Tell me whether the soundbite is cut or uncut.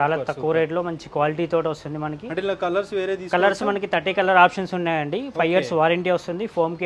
uncut